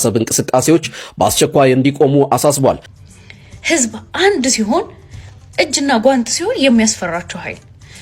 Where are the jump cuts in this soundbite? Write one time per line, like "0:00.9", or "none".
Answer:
0:02.9